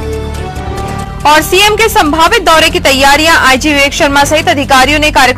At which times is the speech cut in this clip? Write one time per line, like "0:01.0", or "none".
0:00.9

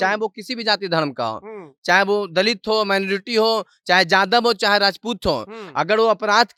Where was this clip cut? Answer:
none

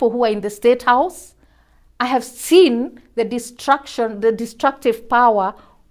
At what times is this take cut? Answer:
none

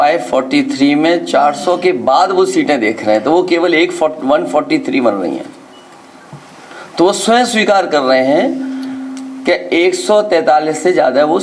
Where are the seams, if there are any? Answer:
none

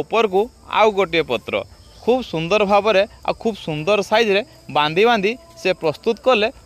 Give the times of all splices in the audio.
none

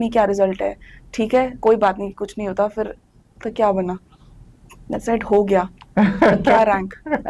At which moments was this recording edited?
none

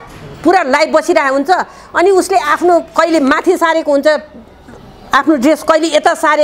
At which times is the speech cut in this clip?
none

